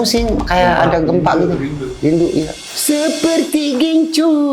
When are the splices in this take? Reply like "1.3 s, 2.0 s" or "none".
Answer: 2.6 s